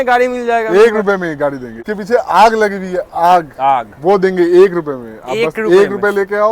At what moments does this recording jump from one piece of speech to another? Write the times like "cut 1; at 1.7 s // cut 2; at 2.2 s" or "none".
cut 1; at 1.7 s